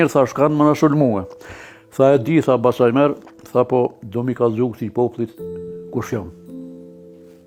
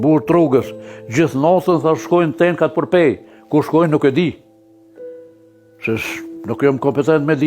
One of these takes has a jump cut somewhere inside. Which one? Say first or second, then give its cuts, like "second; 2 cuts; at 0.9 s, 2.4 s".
second; 2 cuts; at 4.3 s, 5.5 s